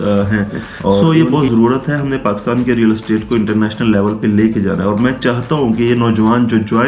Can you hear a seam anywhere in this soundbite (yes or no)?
yes